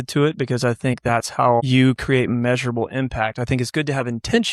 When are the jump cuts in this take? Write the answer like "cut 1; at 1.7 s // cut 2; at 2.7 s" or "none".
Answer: cut 1; at 1.7 s